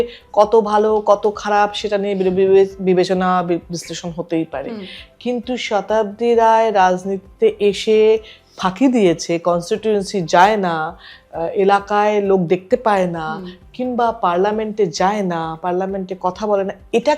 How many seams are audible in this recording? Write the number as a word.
zero